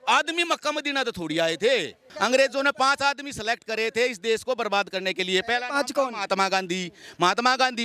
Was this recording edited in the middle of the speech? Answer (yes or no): yes